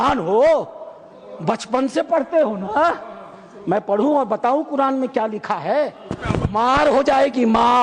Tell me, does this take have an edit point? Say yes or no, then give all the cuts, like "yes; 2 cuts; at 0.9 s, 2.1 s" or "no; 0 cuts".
no; 0 cuts